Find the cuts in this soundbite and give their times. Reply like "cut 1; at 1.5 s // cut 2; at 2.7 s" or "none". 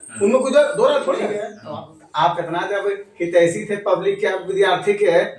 cut 1; at 1.5 s